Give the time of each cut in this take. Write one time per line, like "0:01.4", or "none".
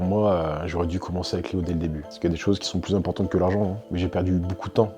0:02.1
0:03.8